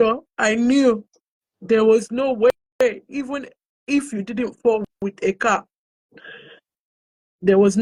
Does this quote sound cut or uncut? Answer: uncut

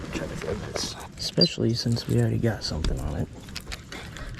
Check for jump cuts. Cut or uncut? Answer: cut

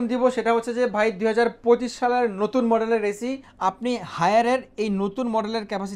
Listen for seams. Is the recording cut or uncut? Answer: cut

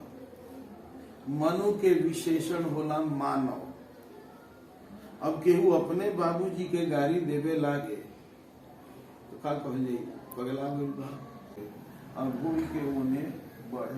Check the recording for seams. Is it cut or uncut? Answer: cut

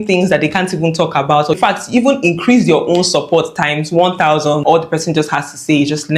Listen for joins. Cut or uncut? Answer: cut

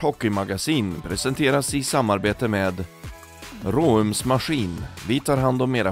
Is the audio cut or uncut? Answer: uncut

